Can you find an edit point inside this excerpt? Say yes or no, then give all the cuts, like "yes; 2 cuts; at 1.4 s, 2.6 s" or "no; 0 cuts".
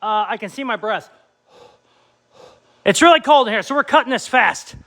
yes; 1 cut; at 2.8 s